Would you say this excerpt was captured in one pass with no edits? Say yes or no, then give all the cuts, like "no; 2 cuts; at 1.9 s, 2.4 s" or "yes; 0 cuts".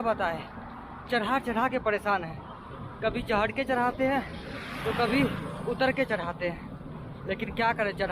no; 1 cut; at 6.8 s